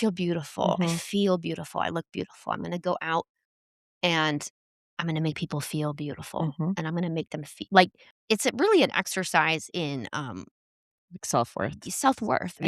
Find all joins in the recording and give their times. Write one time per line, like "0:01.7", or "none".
0:08.1